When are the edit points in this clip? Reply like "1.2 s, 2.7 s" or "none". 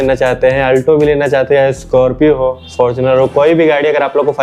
none